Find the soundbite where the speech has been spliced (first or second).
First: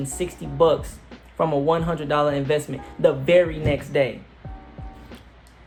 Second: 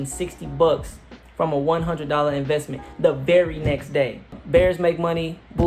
second